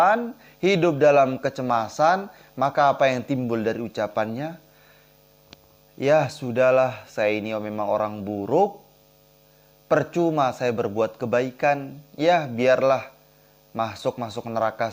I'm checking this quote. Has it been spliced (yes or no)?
no